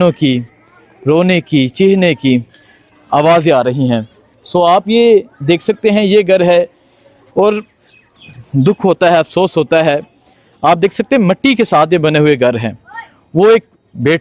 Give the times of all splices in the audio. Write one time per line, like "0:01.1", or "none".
none